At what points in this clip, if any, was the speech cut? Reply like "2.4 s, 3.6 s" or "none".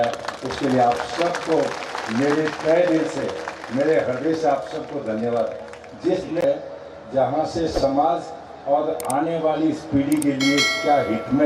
6.5 s